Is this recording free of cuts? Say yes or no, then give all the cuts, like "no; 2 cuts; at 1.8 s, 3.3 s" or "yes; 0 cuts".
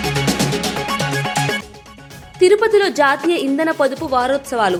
yes; 0 cuts